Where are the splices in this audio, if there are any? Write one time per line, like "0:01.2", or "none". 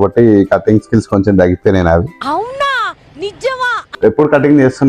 0:04.0